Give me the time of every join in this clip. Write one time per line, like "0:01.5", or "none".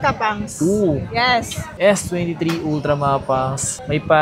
0:01.7